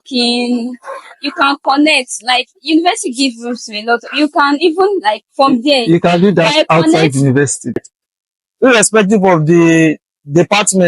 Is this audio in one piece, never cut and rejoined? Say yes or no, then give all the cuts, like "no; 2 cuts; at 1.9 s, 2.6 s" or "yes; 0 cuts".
no; 1 cut; at 7.8 s